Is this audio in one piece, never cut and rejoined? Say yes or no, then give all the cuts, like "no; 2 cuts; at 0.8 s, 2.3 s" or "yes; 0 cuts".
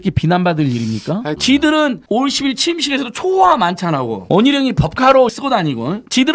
no; 3 cuts; at 1.4 s, 2.0 s, 5.3 s